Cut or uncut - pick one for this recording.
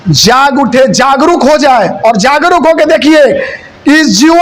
uncut